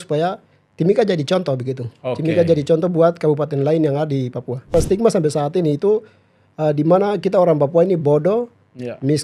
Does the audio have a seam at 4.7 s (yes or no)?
yes